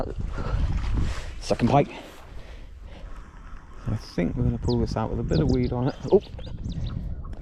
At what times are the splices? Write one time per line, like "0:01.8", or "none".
0:02.9